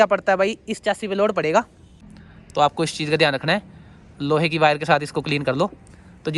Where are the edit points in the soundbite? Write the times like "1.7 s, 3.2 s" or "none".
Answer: 1.9 s